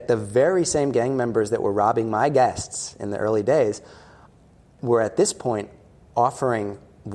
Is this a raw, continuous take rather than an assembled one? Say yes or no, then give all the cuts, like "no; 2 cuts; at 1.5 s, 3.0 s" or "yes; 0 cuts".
no; 1 cut; at 4.7 s